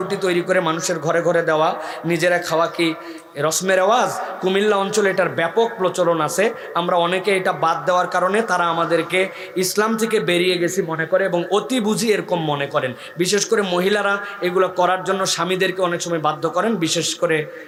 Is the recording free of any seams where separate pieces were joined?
yes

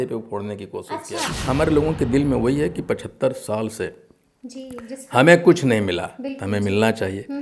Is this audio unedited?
no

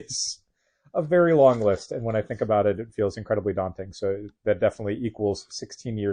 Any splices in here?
no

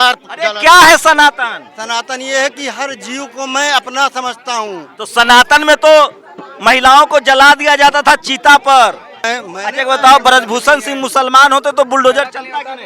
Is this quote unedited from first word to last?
no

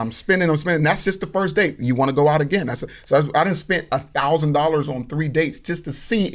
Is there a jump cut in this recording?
no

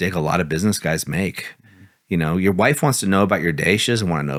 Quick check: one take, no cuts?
yes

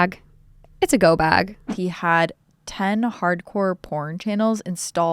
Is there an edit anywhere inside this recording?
yes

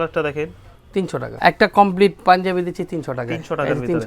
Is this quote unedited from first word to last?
no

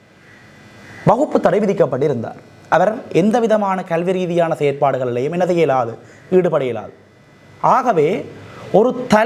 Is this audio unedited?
yes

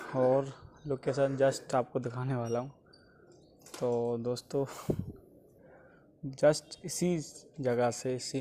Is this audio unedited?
yes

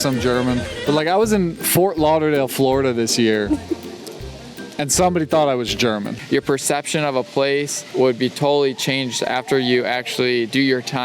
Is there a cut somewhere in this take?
yes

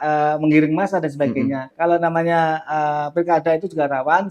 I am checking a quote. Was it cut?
yes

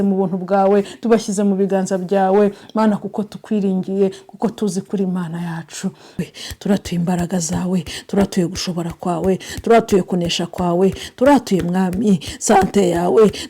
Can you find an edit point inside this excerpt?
yes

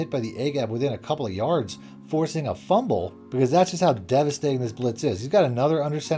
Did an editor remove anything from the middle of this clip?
no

